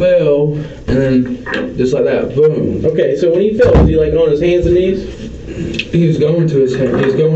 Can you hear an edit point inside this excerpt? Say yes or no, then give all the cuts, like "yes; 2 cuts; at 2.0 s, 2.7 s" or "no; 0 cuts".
no; 0 cuts